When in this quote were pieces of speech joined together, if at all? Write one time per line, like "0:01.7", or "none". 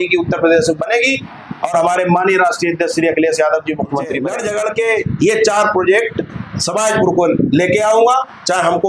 0:04.3